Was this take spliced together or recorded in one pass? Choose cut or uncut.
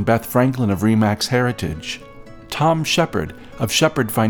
uncut